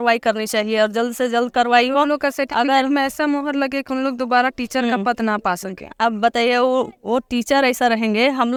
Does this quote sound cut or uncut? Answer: uncut